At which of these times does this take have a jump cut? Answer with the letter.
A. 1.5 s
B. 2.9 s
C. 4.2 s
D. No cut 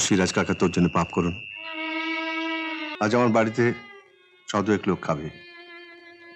B